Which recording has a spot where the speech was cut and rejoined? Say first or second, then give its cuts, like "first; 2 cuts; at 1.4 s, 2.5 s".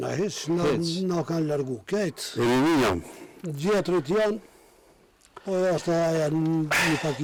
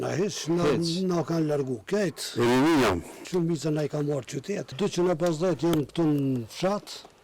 second; 2 cuts; at 3.2 s, 4.7 s